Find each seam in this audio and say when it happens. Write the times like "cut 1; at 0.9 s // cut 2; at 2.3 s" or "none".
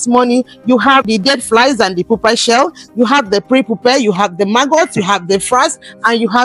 cut 1; at 1.1 s